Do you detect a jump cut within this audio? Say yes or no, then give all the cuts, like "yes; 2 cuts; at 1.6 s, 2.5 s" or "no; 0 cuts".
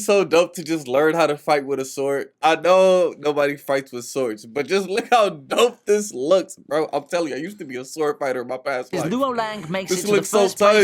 no; 0 cuts